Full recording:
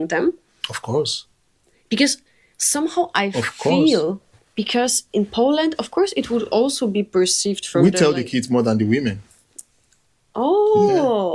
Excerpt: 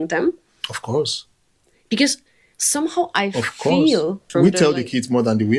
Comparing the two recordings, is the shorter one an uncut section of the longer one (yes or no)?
no